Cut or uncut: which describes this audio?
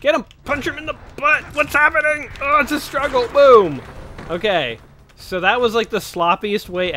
uncut